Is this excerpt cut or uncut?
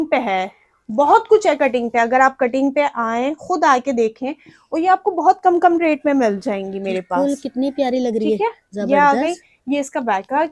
uncut